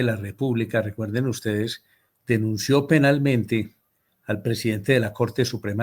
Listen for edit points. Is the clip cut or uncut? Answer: uncut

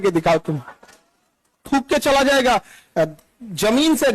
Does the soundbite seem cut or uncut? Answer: cut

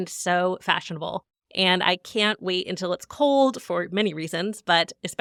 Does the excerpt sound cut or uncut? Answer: uncut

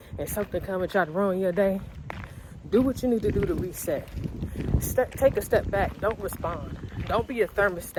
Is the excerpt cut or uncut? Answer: uncut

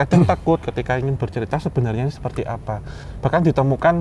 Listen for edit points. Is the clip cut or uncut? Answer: cut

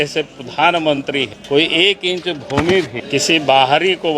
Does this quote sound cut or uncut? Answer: cut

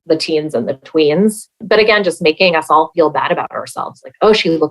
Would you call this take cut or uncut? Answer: cut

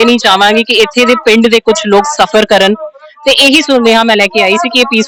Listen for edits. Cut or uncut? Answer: uncut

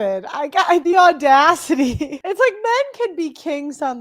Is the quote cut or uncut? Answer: cut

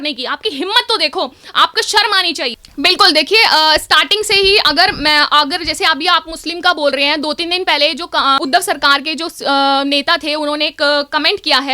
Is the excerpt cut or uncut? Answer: cut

